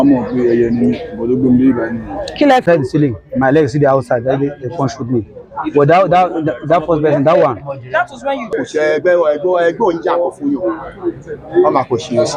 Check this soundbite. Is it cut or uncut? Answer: cut